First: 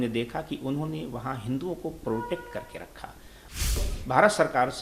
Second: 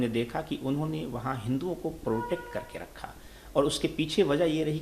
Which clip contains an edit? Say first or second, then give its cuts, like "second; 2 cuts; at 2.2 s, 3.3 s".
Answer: first; 1 cut; at 3.8 s